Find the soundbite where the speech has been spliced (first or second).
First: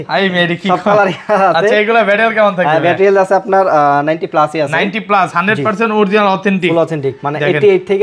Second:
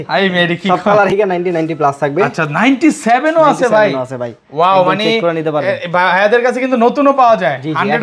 second